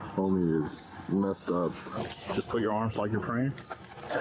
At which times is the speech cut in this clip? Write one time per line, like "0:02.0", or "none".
0:01.9